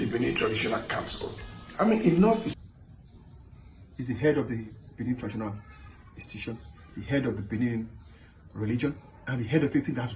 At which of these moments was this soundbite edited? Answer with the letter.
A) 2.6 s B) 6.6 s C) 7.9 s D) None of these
A